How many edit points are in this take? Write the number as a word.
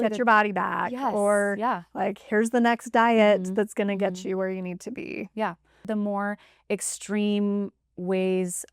one